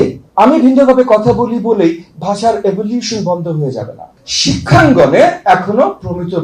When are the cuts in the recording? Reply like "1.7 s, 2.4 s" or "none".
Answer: 4.1 s